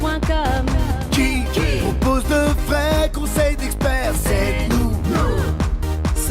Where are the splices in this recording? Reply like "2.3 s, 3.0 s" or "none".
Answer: none